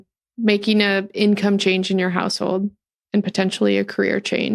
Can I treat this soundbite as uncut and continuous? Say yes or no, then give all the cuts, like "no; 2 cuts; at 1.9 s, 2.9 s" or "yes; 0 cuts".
yes; 0 cuts